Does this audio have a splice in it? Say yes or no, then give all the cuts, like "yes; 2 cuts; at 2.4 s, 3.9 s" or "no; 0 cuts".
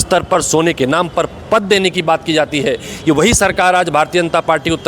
no; 0 cuts